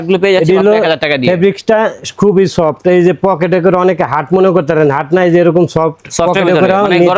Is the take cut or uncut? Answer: uncut